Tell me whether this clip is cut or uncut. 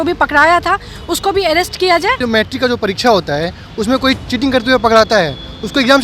cut